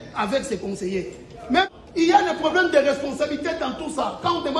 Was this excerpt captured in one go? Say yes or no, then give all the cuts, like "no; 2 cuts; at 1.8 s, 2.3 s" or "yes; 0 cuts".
no; 1 cut; at 1.7 s